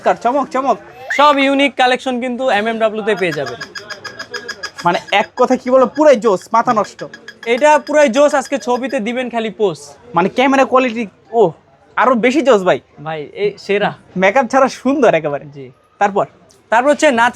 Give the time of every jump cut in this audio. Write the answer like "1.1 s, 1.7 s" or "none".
none